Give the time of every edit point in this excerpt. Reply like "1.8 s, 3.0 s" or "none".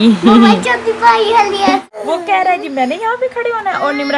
2.0 s